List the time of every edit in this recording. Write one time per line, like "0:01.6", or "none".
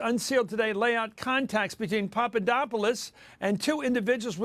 none